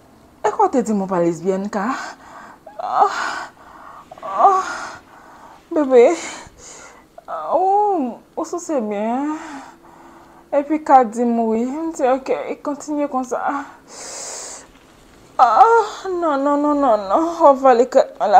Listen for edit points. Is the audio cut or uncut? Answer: uncut